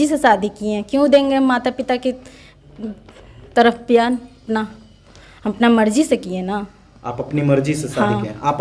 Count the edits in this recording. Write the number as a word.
zero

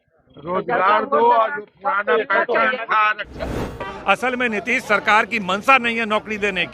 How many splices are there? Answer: one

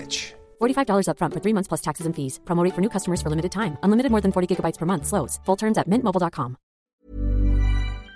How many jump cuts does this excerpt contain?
one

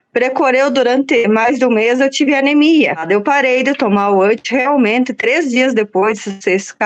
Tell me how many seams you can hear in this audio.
one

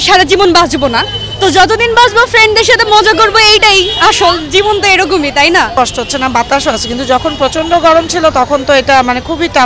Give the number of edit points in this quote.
zero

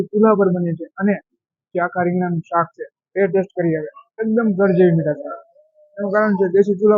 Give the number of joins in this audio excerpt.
one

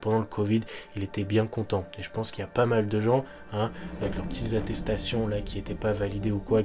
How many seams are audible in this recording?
zero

